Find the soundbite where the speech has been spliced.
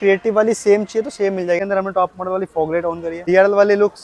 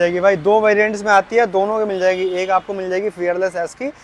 first; 2 cuts; at 1.6 s, 3.1 s

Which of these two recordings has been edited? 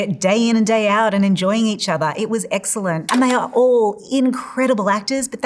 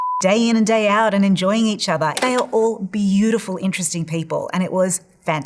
second; 1 cut; at 2.1 s

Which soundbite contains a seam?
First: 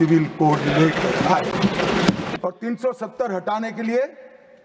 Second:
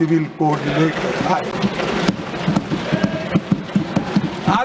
first; 1 cut; at 2.3 s

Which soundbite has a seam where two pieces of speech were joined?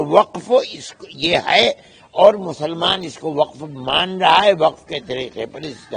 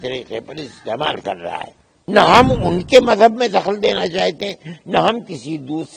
second; 1 cut; at 1.9 s

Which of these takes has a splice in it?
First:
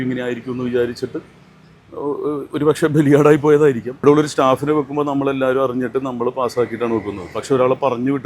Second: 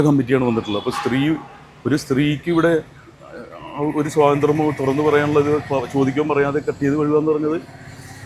first; 1 cut; at 3.9 s

